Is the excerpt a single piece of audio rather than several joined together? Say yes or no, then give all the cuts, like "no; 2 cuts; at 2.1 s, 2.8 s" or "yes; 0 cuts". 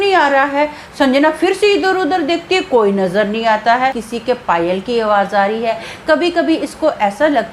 no; 1 cut; at 4.1 s